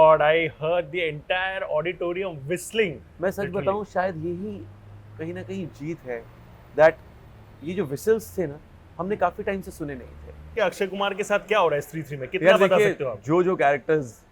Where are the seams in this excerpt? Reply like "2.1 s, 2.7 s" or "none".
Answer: 10.5 s